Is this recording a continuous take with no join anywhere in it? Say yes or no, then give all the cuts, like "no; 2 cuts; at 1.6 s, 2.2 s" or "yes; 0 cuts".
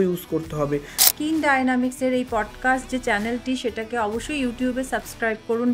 no; 1 cut; at 1.0 s